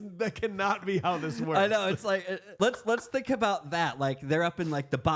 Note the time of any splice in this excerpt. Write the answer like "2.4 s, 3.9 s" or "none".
2.4 s